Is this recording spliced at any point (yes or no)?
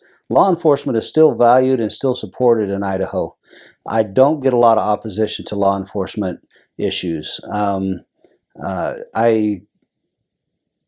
no